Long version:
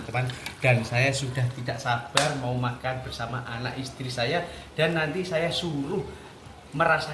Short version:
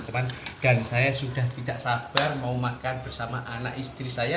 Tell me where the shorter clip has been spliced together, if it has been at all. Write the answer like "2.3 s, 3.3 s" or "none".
none